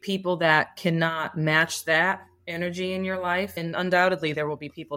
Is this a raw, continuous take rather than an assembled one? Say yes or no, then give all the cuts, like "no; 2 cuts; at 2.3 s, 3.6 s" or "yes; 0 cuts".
no; 1 cut; at 3.6 s